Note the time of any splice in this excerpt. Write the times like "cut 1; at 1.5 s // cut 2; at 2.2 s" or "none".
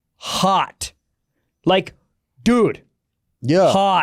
none